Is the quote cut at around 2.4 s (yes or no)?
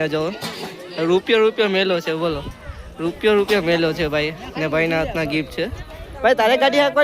no